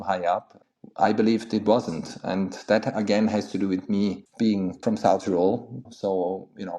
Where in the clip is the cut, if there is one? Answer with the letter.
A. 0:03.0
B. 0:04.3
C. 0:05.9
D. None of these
C